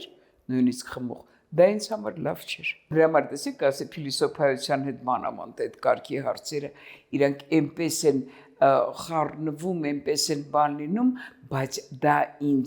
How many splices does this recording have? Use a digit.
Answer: 0